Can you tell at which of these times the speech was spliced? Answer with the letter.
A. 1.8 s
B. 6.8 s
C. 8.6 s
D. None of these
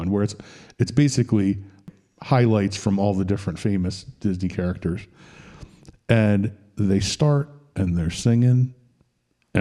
A